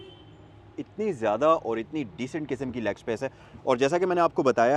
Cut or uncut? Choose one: uncut